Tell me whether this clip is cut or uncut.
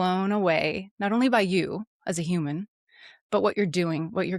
uncut